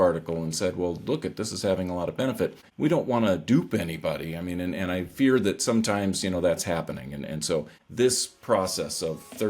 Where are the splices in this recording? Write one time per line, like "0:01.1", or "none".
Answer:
0:02.6
0:07.8